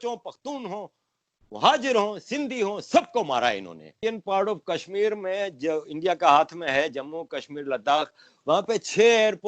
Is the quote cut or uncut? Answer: cut